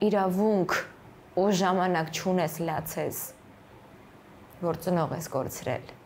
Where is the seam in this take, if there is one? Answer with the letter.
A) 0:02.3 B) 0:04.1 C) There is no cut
C